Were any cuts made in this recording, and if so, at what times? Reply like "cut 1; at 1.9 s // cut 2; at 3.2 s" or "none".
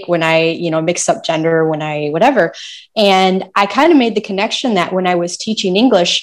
none